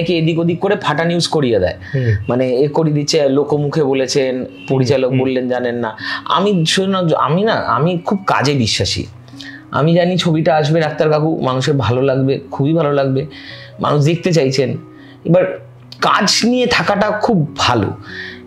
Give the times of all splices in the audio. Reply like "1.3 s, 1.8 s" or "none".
none